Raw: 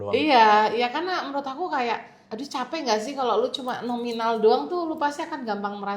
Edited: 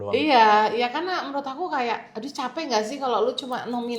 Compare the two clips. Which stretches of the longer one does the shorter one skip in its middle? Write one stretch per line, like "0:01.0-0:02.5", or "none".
0:02.1-0:02.3